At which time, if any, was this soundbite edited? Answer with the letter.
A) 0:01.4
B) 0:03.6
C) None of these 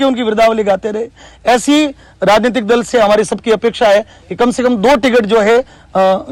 C